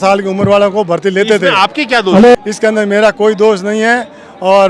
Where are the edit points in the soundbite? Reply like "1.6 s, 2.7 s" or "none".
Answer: none